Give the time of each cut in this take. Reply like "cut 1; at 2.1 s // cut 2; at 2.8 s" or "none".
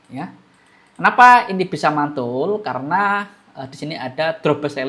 none